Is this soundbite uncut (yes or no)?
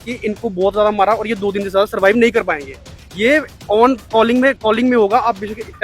yes